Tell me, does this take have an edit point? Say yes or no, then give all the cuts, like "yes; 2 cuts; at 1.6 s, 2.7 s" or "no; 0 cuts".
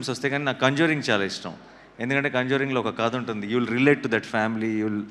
no; 0 cuts